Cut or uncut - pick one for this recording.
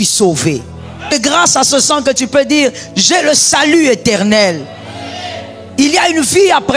cut